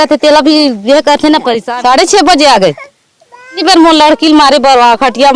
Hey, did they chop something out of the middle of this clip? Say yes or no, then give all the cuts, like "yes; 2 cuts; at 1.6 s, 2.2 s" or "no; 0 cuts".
yes; 2 cuts; at 1.6 s, 3.6 s